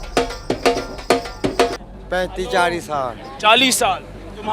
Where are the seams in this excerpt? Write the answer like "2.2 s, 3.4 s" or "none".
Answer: 1.9 s